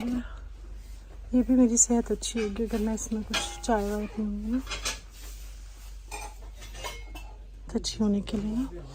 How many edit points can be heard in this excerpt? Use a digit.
0